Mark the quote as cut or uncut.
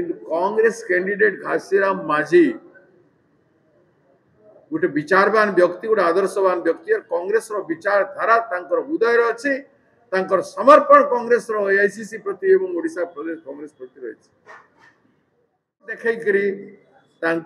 cut